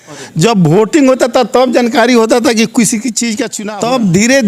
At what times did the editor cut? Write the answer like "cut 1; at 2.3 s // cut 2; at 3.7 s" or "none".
cut 1; at 3.5 s